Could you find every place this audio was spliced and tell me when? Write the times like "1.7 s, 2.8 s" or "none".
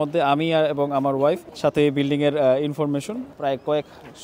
1.5 s, 3.2 s